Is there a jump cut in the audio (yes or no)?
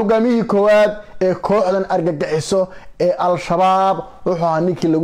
no